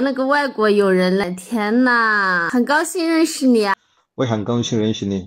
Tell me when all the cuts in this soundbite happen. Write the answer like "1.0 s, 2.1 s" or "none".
1.2 s, 2.4 s, 3.7 s